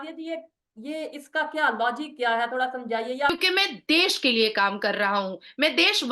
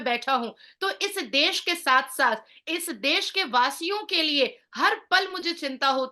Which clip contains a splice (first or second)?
first